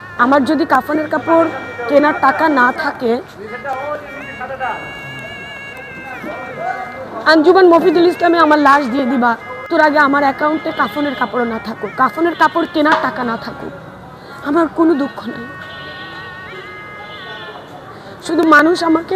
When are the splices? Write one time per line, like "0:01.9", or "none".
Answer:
0:09.6